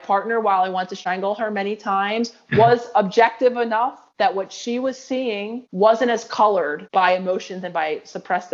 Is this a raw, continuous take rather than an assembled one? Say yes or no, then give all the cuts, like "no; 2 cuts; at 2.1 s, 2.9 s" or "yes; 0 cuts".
no; 1 cut; at 1.0 s